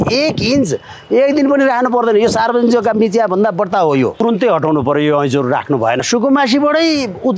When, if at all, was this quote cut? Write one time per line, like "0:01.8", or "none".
0:04.2
0:06.0